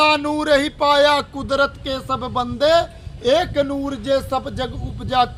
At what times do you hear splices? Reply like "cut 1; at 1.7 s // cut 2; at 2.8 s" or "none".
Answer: none